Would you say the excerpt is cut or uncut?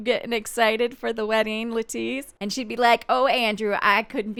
uncut